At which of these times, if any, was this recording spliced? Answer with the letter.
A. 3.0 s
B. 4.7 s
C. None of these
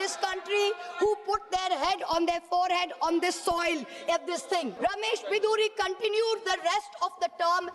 B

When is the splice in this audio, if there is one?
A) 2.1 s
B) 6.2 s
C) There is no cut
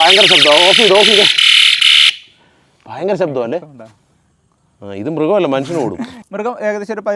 B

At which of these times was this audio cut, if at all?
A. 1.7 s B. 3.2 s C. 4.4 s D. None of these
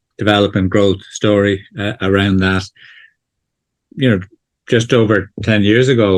D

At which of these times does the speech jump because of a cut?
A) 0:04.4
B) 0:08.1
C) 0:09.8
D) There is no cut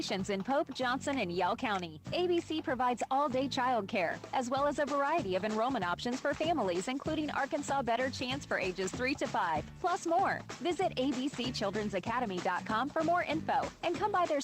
D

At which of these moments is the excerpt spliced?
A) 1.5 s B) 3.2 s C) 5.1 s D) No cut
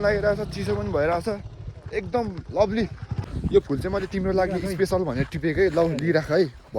B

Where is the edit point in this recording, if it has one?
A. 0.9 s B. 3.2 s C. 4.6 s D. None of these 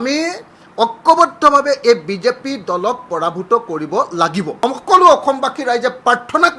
C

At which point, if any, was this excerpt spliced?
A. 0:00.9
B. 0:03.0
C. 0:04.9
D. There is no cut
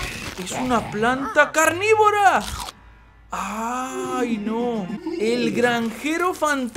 C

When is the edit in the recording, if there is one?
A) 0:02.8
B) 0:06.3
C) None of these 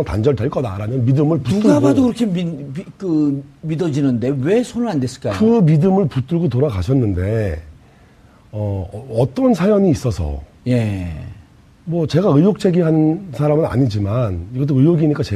B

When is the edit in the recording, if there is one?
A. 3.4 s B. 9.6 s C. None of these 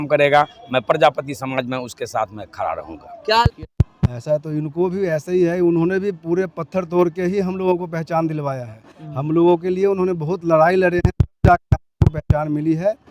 A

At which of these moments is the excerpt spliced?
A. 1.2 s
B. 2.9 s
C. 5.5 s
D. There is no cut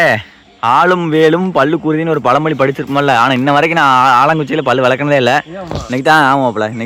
D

